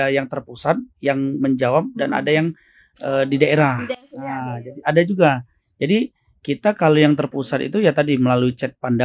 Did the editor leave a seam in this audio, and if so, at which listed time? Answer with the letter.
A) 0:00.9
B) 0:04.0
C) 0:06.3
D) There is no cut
D